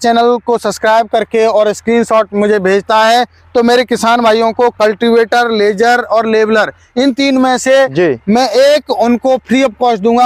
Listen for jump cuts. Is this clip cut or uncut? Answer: uncut